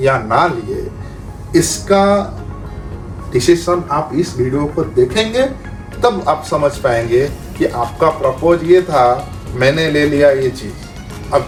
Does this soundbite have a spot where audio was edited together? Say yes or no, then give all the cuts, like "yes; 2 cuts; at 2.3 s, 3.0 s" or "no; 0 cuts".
no; 0 cuts